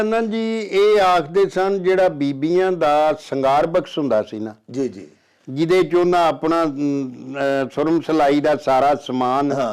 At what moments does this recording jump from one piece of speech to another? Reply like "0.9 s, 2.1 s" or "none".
none